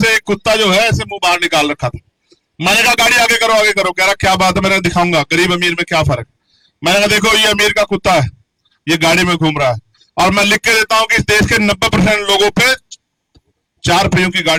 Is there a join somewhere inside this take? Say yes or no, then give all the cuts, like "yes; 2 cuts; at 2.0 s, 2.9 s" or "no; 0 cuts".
no; 0 cuts